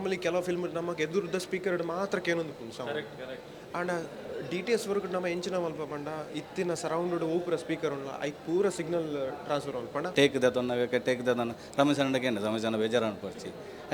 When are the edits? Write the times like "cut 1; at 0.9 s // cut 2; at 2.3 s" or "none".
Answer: cut 1; at 10.1 s

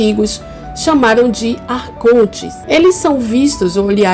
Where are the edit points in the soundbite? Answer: cut 1; at 2.5 s

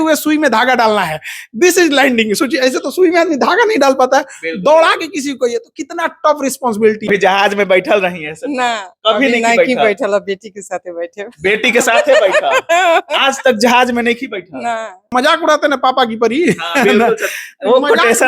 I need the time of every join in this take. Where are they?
cut 1; at 7.1 s // cut 2; at 15.1 s

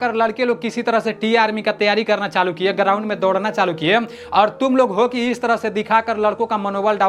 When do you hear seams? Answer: none

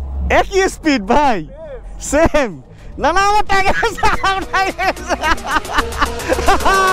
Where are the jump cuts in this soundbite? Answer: none

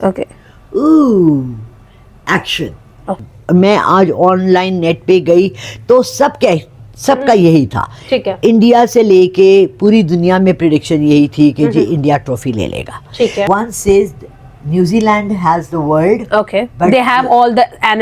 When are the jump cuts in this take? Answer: cut 1; at 3.2 s // cut 2; at 13.5 s

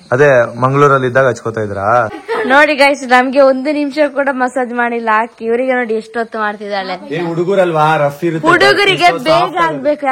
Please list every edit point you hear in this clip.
cut 1; at 2.2 s

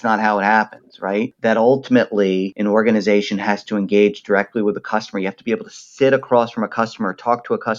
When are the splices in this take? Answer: cut 1; at 1.3 s // cut 2; at 2.5 s

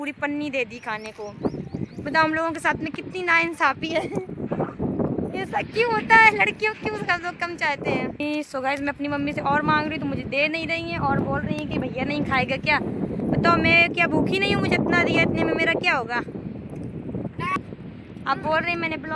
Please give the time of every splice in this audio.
none

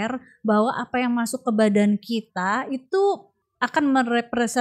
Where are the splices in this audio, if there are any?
cut 1; at 3.4 s

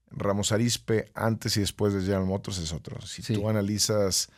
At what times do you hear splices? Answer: none

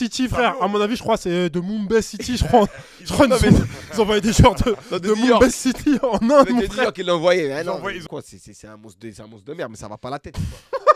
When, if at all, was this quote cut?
cut 1; at 8.0 s

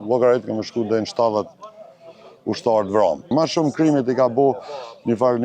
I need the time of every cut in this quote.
cut 1; at 3.3 s

